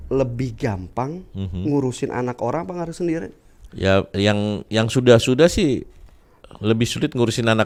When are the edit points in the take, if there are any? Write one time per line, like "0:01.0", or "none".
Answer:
none